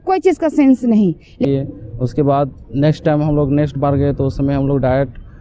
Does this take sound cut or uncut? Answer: cut